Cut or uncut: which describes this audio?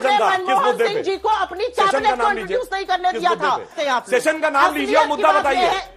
cut